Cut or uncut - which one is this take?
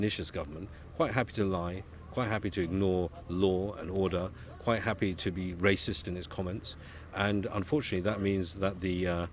uncut